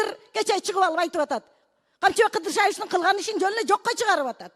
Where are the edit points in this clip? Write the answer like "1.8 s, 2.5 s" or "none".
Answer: none